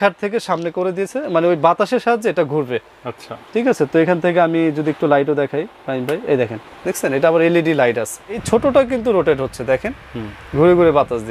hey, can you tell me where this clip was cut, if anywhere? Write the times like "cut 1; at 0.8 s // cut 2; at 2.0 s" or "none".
cut 1; at 8.4 s